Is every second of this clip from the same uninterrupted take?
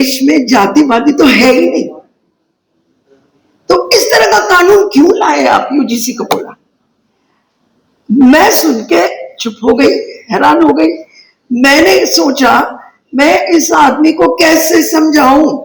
yes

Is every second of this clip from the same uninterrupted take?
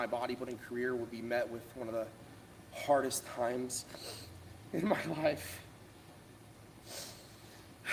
yes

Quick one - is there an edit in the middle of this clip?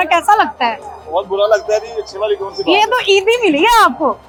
no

